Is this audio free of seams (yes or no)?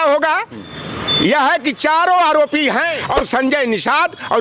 no